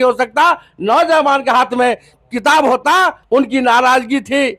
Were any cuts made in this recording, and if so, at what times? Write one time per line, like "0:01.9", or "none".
0:03.2